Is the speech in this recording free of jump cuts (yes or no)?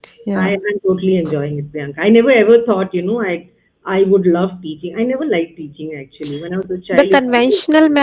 yes